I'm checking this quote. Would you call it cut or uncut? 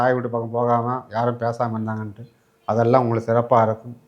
uncut